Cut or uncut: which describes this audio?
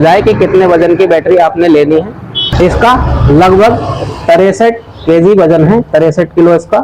cut